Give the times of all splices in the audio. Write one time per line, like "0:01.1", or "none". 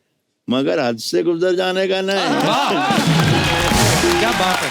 none